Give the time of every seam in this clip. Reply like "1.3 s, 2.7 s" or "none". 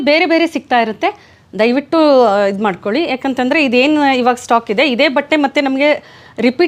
none